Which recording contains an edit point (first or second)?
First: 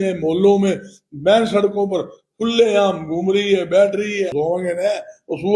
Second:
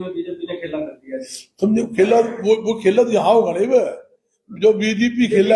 first